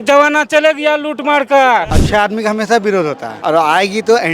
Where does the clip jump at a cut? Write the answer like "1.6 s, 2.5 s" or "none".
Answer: 2.0 s, 3.3 s